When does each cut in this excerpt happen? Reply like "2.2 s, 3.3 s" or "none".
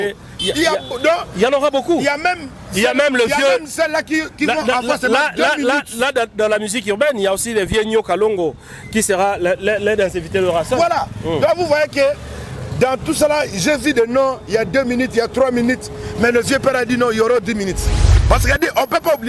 18.1 s